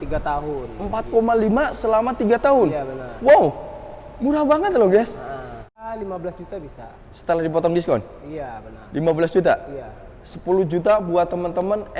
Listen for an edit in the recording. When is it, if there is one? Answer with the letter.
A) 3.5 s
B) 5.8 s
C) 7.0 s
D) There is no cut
B